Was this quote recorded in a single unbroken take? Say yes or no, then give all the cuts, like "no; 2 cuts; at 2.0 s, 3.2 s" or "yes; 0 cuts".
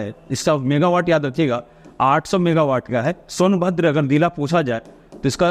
yes; 0 cuts